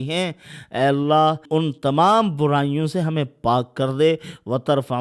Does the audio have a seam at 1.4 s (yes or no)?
yes